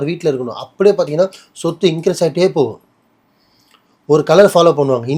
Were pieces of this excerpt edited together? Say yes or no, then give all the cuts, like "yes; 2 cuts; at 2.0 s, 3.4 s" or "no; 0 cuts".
no; 0 cuts